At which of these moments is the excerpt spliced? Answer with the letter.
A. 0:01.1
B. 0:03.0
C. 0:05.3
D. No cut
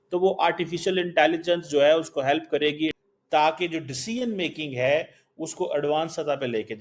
B